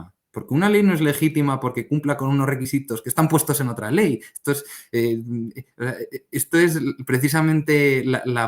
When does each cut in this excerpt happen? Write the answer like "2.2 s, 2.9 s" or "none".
none